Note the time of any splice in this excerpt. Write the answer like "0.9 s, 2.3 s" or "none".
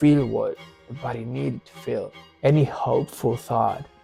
2.2 s